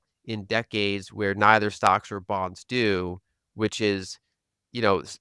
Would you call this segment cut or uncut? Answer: uncut